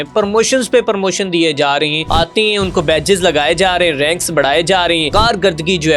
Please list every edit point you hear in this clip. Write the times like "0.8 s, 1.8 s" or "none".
2.0 s, 5.1 s